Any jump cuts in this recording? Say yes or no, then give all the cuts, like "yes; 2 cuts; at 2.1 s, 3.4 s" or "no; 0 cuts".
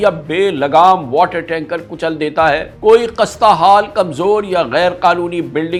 no; 0 cuts